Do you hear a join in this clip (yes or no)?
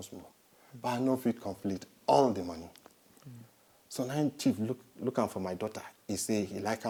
no